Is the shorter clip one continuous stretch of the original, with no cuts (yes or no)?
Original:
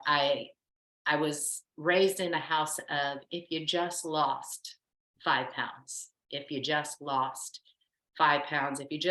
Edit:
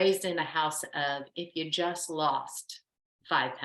yes